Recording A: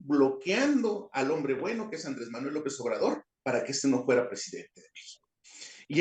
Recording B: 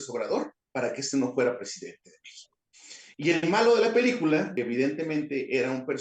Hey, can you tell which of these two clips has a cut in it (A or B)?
B